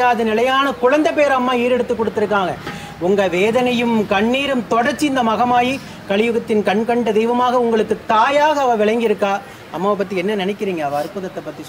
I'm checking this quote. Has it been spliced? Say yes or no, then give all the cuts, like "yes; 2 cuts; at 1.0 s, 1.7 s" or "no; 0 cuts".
yes; 1 cut; at 2.7 s